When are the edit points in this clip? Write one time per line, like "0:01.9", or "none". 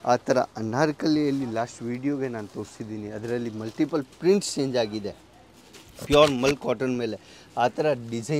none